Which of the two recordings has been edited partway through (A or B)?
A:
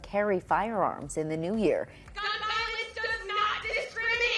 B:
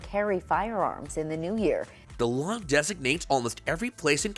A